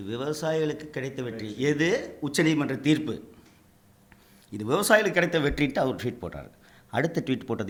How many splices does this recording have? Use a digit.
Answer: 0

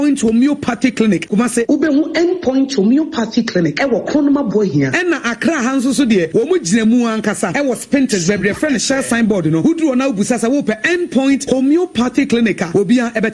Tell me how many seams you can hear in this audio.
1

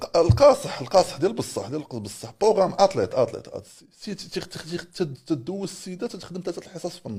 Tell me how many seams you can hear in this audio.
0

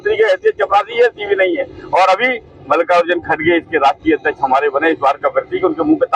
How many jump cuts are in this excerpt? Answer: 0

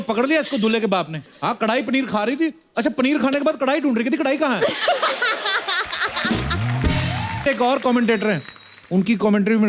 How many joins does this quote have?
1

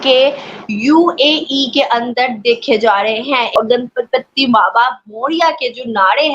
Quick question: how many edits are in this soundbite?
1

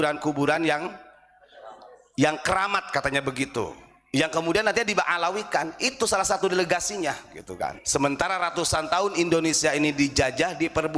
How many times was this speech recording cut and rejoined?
1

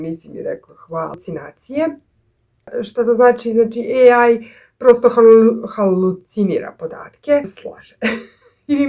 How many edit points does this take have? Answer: 2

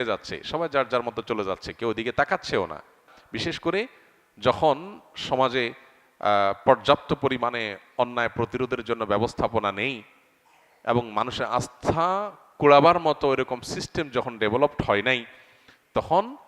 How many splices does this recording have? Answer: 1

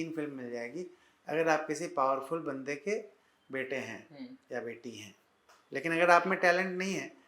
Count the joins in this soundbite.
0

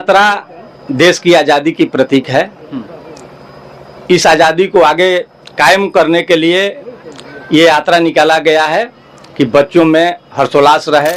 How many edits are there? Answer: 0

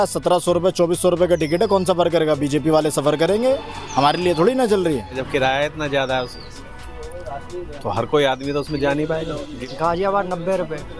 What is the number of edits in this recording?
2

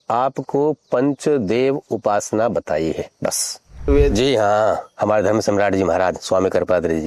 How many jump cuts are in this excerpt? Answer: 1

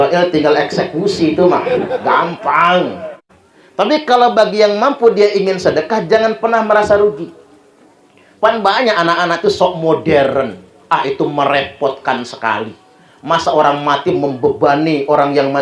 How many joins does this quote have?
1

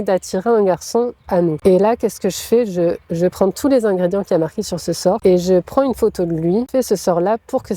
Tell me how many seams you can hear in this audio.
3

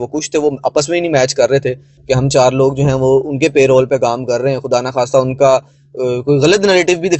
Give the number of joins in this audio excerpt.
1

